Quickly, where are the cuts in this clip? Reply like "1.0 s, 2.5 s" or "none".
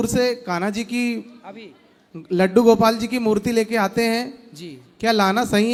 none